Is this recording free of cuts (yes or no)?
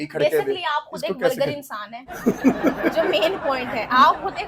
yes